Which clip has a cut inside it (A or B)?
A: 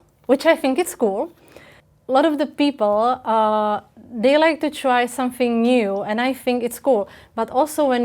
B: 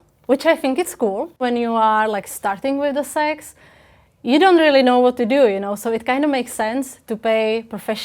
B